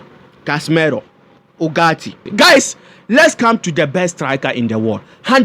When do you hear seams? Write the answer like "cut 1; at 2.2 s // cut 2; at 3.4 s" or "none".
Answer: cut 1; at 2.2 s